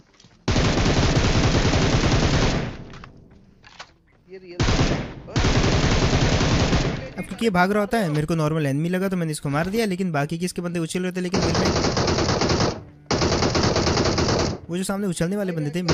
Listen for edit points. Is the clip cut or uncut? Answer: uncut